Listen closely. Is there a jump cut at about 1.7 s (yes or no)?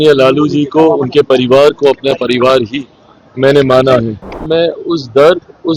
no